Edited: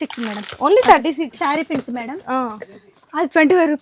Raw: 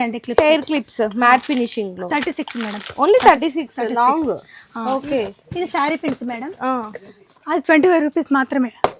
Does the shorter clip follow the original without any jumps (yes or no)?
no